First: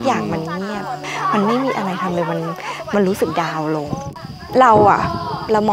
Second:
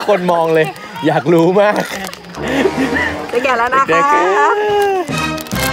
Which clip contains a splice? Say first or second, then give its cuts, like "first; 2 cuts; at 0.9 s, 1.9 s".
first; 2 cuts; at 1.0 s, 4.0 s